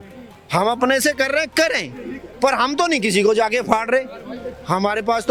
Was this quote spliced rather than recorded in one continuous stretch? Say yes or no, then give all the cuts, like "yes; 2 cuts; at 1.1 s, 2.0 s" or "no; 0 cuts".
no; 0 cuts